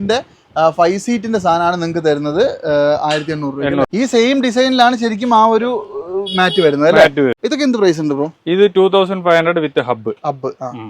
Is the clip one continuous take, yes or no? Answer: no